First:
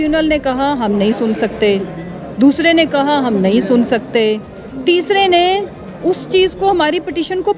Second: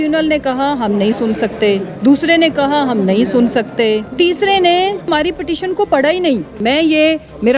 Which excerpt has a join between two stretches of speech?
second; 4 cuts; at 1.9 s, 4.1 s, 5.1 s, 6.5 s

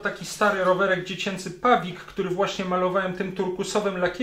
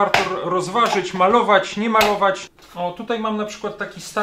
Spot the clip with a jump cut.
second; 1 cut; at 2.5 s

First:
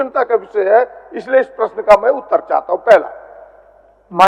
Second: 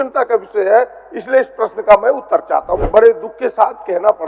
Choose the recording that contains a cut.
second; 1 cut; at 2.8 s

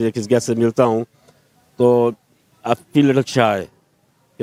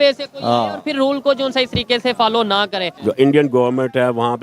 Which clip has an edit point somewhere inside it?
second; 1 cut; at 2.9 s

